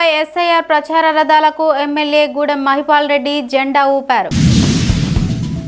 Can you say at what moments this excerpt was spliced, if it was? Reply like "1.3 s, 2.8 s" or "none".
none